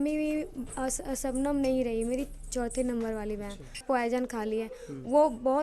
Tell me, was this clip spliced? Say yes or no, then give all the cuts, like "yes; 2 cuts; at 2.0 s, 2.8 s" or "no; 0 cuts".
yes; 1 cut; at 3.8 s